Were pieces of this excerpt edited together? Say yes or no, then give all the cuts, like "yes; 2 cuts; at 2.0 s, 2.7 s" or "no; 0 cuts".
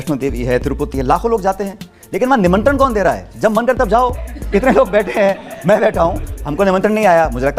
no; 0 cuts